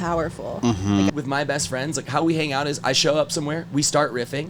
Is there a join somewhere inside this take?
yes; 1 cut; at 1.1 s

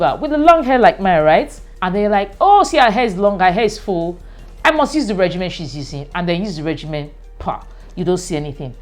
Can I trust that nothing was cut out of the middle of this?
yes; 0 cuts

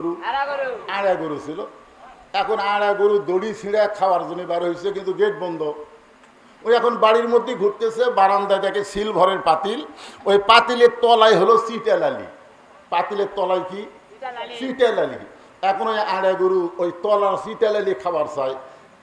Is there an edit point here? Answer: no; 0 cuts

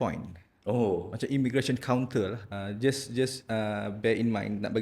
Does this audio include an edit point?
yes; 1 cut; at 2.4 s

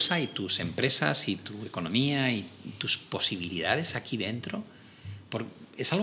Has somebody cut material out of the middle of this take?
no; 0 cuts

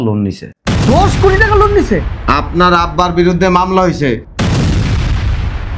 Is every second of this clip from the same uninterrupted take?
no; 1 cut; at 2.1 s

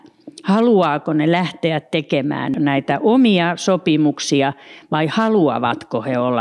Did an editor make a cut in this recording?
yes; 1 cut; at 2.5 s

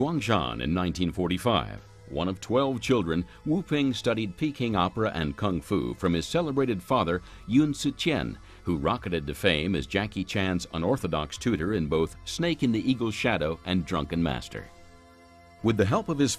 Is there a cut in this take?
no; 0 cuts

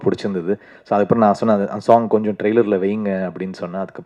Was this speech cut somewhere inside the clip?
no; 0 cuts

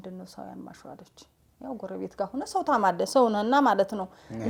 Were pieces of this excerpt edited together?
no; 0 cuts

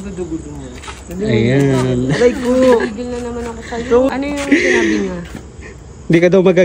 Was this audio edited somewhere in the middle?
yes; 1 cut; at 4.1 s

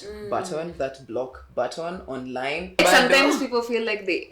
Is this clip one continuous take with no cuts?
no; 1 cut; at 2.8 s

